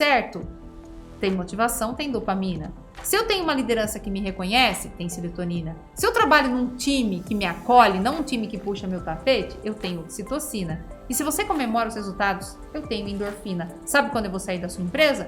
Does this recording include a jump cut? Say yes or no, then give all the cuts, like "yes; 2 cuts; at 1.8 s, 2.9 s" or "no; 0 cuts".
no; 0 cuts